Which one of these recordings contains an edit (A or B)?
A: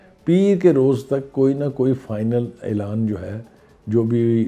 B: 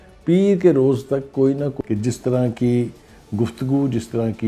B